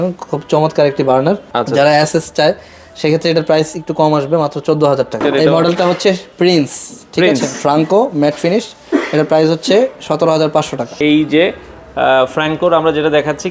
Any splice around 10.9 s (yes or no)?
yes